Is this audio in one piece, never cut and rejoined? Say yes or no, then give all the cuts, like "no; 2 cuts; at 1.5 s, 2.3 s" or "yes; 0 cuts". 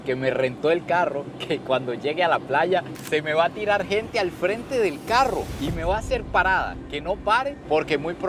yes; 0 cuts